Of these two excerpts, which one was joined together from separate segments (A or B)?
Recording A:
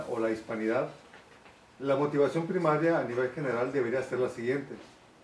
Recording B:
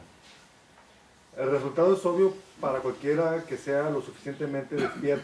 A